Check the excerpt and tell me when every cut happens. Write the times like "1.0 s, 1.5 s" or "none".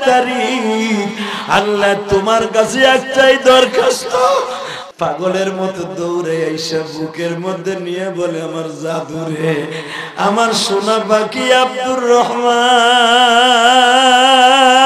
4.7 s

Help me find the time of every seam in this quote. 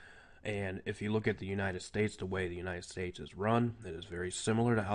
1.3 s

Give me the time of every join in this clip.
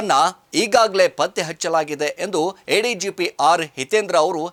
none

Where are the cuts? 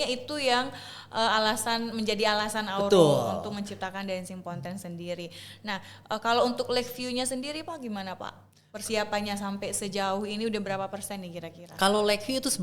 none

